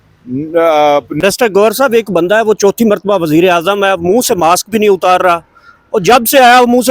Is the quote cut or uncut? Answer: cut